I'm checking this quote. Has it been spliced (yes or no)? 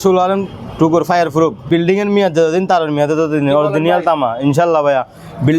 yes